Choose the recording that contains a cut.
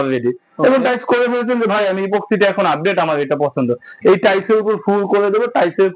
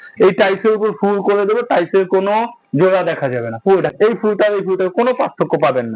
second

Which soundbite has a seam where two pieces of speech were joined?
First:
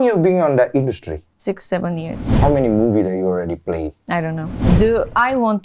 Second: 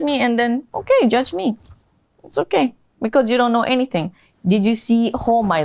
first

